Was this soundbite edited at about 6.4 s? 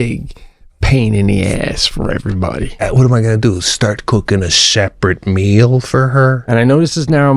yes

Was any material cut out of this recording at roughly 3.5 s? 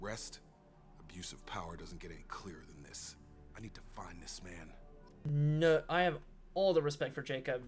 no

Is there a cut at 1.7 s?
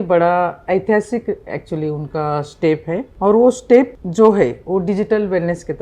no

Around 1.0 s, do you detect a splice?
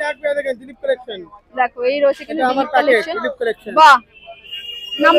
no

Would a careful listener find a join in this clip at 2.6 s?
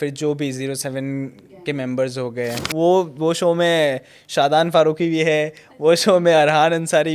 yes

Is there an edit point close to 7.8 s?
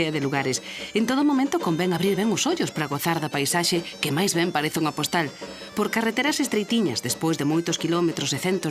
no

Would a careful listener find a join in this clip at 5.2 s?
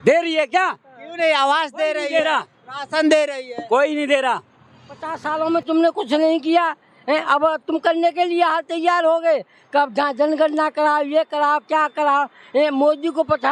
yes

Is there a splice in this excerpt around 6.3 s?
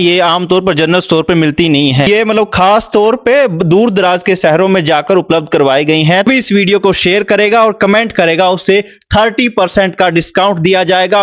yes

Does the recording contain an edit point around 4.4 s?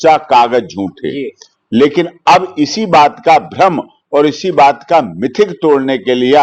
no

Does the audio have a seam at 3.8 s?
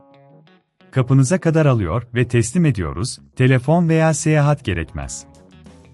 no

